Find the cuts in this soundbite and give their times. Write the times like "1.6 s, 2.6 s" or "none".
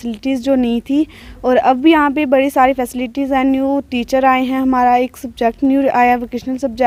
none